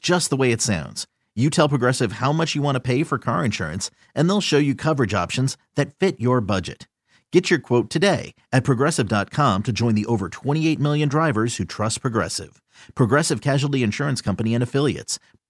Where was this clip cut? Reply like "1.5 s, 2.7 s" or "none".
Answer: none